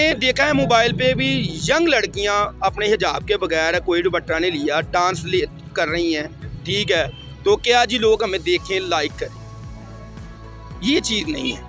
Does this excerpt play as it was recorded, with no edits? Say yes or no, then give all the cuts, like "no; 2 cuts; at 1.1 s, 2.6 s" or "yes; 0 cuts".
yes; 0 cuts